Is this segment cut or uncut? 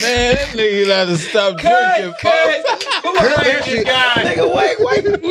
uncut